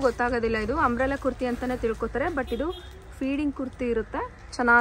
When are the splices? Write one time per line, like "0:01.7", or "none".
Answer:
none